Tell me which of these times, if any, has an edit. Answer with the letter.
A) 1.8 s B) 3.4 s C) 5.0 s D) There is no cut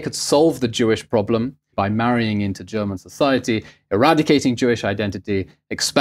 A